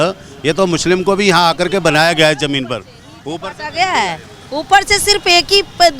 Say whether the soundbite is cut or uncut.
uncut